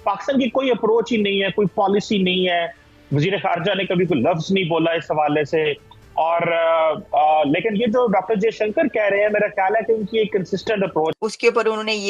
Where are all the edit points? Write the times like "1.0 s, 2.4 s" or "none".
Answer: 11.1 s